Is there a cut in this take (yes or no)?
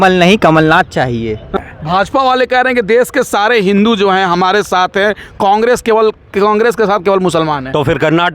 yes